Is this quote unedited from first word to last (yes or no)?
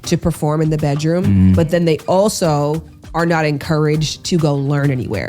no